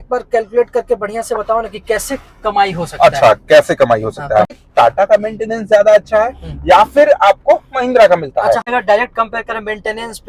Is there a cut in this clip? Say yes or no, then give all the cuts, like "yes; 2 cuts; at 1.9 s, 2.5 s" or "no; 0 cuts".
yes; 2 cuts; at 4.5 s, 8.6 s